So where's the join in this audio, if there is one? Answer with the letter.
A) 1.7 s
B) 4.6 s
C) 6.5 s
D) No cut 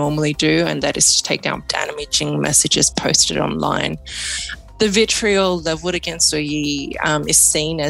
A